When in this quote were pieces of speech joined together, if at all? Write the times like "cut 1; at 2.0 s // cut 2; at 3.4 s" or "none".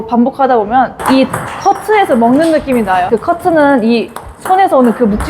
cut 1; at 1.0 s // cut 2; at 3.1 s